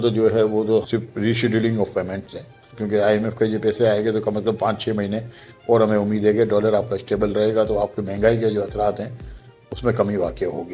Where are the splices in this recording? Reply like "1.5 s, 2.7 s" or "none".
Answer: 0.9 s, 2.7 s